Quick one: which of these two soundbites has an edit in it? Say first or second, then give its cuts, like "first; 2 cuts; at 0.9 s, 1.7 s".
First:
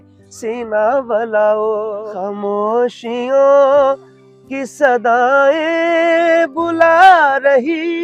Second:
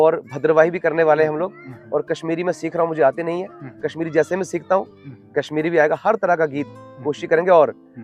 first; 1 cut; at 2.0 s